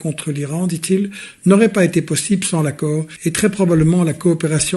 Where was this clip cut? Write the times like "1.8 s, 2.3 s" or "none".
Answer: 3.1 s